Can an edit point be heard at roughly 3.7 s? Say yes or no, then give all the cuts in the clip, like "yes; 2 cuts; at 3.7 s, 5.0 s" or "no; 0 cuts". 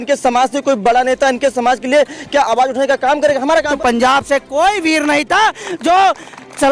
yes; 1 cut; at 3.7 s